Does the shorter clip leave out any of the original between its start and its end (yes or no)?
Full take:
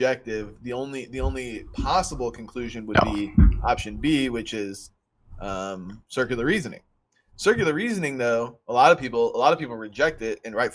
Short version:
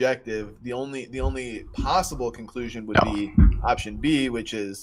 no